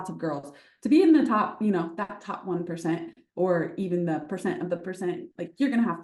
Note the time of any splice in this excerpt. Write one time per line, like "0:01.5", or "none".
none